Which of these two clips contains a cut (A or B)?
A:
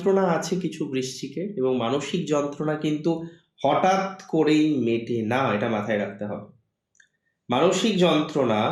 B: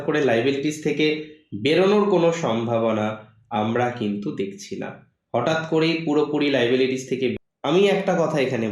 B